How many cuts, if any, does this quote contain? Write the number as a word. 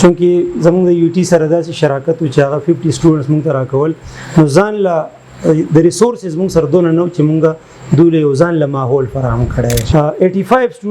one